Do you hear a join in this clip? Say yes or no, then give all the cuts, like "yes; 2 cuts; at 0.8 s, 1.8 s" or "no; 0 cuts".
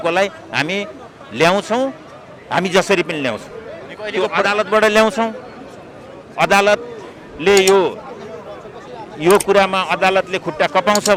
no; 0 cuts